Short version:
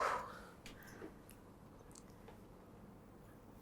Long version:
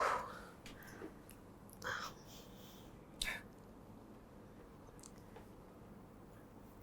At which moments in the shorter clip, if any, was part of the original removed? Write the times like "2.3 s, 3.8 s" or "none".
1.7 s